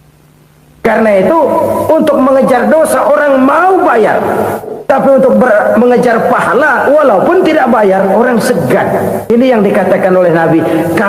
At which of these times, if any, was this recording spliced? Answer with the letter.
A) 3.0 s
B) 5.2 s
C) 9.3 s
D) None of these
C